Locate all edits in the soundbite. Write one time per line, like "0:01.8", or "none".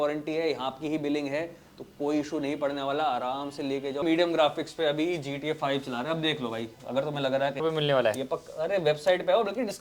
0:04.0
0:07.6